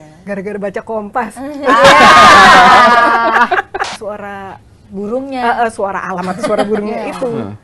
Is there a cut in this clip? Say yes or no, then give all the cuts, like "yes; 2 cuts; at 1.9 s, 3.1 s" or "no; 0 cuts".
yes; 1 cut; at 3.9 s